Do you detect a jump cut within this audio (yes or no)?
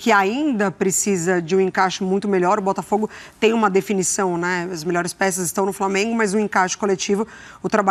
no